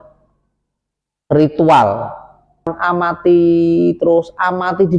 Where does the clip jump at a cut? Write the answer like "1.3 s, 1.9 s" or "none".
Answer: 2.7 s